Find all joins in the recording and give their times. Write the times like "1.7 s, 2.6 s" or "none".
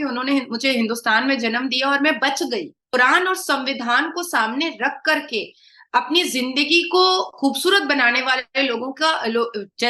2.9 s